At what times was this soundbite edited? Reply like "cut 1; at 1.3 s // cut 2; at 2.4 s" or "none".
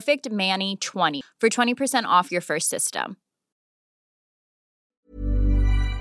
cut 1; at 1.1 s